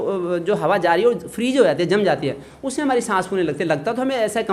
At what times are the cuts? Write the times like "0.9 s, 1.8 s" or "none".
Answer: none